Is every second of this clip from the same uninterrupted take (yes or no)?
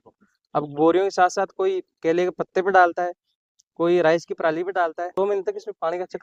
no